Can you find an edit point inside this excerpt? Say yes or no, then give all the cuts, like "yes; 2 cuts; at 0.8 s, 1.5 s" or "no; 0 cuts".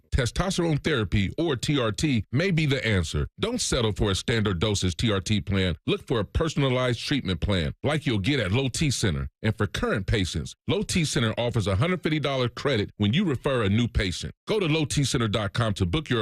no; 0 cuts